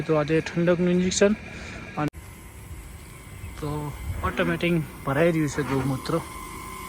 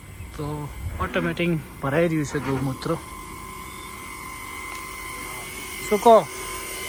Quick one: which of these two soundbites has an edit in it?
first; 1 cut; at 2.1 s

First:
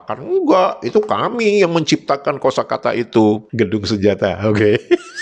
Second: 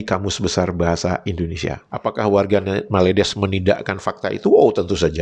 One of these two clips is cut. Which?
first; 1 cut; at 3.5 s

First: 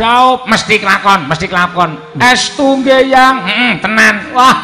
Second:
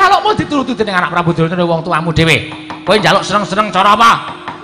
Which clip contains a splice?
first; 1 cut; at 2.0 s

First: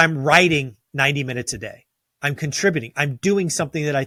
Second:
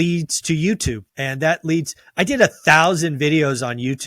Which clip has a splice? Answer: second; 1 cut; at 1.1 s

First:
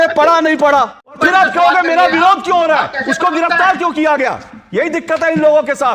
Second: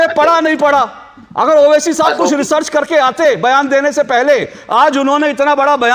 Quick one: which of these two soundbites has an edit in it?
first; 1 cut; at 1.2 s

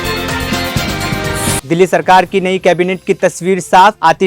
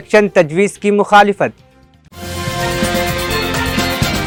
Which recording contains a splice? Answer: first; 1 cut; at 1.6 s

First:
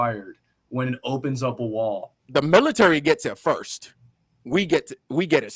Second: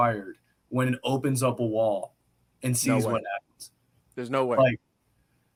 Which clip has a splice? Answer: first; 1 cut; at 2.2 s

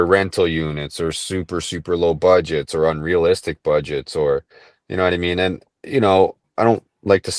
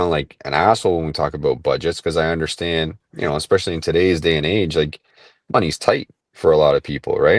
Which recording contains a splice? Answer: first; 1 cut; at 6.4 s

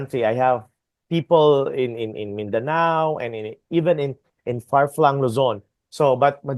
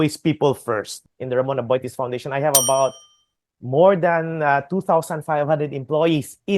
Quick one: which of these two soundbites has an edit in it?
second; 1 cut; at 1.0 s

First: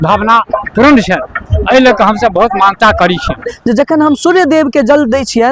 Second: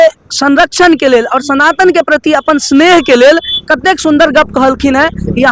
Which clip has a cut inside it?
first; 1 cut; at 3.5 s

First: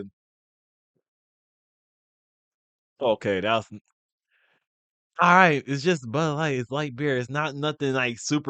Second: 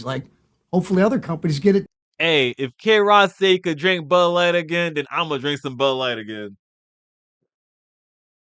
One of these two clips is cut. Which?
second; 1 cut; at 1.9 s

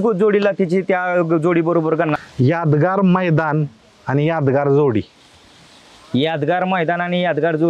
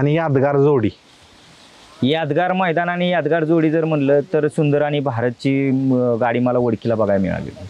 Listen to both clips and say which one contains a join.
first; 1 cut; at 2.2 s

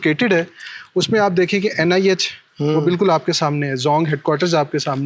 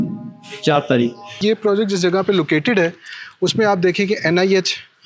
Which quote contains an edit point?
second; 1 cut; at 1.3 s

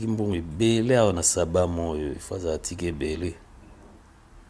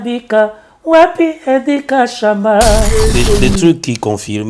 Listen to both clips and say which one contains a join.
second; 1 cut; at 3.1 s

